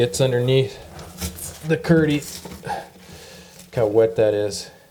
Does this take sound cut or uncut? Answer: uncut